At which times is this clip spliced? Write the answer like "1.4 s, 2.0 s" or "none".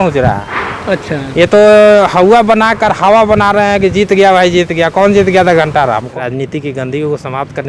6.1 s